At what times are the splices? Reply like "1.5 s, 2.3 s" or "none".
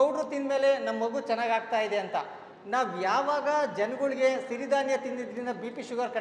none